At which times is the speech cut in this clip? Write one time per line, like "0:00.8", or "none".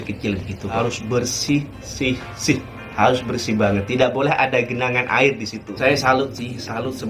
0:00.8
0:05.7